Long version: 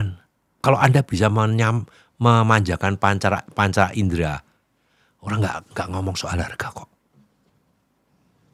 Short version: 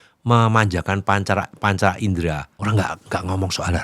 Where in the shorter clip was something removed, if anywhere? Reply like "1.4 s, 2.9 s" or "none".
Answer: 2.5 s